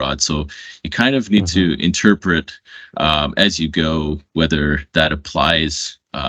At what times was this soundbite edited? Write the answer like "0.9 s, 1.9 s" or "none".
none

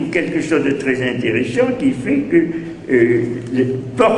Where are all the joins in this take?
3.0 s

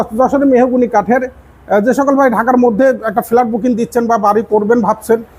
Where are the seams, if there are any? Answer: none

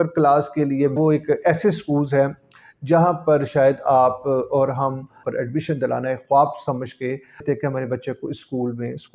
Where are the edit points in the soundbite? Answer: 0.9 s, 5.2 s, 7.4 s

